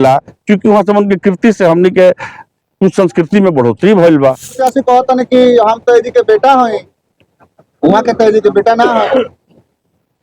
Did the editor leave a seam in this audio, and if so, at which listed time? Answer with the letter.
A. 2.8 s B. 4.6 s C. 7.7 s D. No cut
B